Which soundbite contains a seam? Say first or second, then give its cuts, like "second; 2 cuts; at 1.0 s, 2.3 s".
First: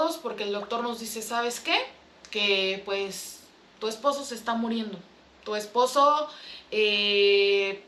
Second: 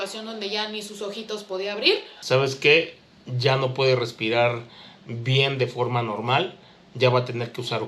second; 1 cut; at 2.1 s